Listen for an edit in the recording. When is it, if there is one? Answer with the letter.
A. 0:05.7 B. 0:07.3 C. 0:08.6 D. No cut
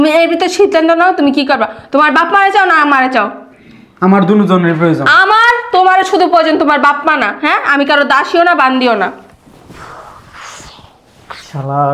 D